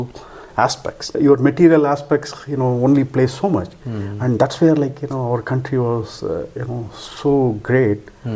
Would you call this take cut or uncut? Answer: cut